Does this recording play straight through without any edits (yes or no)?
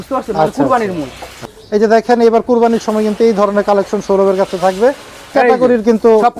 no